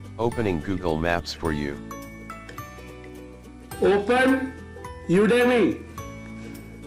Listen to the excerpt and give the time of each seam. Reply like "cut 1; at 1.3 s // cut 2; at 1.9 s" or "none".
cut 1; at 1.7 s // cut 2; at 3.8 s // cut 3; at 5.8 s